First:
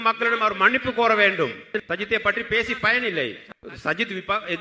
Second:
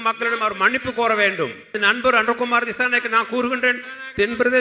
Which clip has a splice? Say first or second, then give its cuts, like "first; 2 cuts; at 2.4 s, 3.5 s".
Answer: first; 1 cut; at 1.7 s